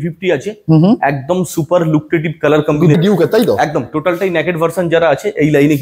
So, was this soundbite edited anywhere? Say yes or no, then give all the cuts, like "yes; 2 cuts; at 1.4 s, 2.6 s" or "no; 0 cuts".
yes; 1 cut; at 3.0 s